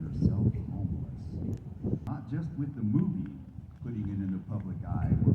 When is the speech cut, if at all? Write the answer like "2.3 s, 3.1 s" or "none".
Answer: 2.1 s